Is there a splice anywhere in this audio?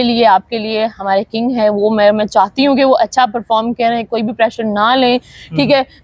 no; 0 cuts

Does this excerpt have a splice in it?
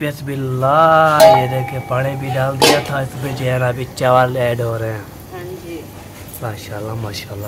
no; 0 cuts

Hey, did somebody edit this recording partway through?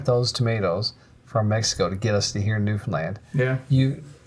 no; 0 cuts

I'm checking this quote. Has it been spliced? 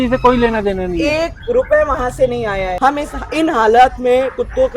yes; 1 cut; at 2.7 s

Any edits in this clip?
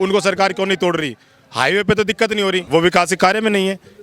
yes; 1 cut; at 2.6 s

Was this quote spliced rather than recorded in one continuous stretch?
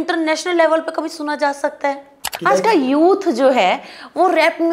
yes; 1 cut; at 2.2 s

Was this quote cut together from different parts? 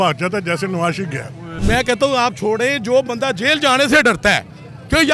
yes; 1 cut; at 1.5 s

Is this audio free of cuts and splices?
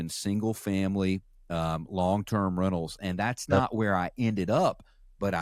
yes; 0 cuts

